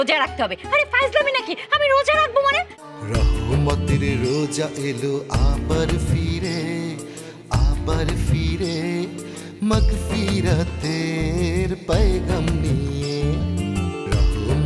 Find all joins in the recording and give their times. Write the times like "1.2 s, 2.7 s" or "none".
2.8 s